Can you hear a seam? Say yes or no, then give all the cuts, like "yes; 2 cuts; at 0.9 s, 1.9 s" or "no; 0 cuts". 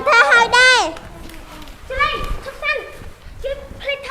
no; 0 cuts